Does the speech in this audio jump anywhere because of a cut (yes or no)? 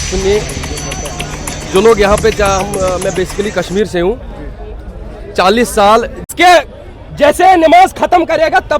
yes